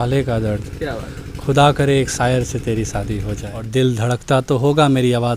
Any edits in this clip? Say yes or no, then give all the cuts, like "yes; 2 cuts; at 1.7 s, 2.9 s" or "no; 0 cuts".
yes; 1 cut; at 3.5 s